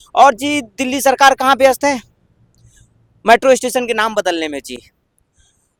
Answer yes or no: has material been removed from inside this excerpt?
no